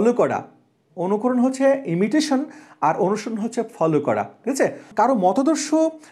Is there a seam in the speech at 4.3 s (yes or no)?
no